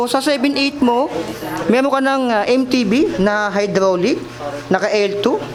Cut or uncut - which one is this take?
uncut